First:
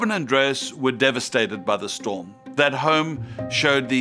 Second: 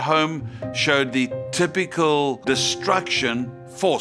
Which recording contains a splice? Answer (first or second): second